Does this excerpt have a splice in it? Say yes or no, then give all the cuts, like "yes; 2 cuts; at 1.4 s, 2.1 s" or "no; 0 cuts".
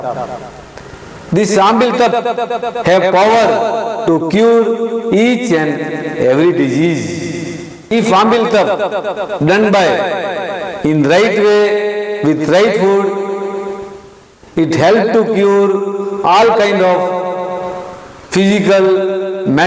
no; 0 cuts